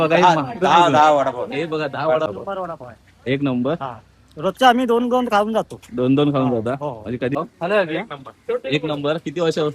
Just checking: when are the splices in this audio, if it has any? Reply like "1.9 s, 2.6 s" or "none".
2.3 s, 7.4 s